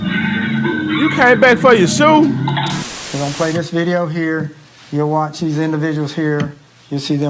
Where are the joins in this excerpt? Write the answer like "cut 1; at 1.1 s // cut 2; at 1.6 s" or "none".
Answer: cut 1; at 3.0 s